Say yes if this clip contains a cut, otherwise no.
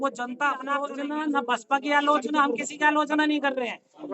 yes